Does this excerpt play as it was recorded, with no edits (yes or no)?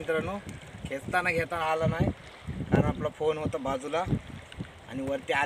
yes